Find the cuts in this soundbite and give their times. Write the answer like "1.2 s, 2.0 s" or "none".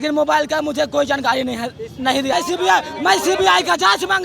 2.3 s